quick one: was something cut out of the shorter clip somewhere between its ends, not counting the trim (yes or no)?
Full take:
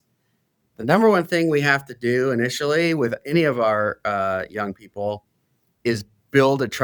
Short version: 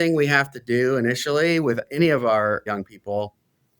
yes